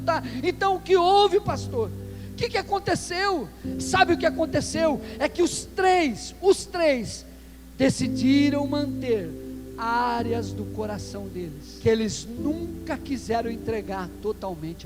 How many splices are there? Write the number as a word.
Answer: one